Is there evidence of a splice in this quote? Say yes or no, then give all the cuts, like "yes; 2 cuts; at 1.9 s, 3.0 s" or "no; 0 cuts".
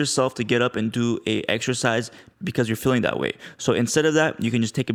no; 0 cuts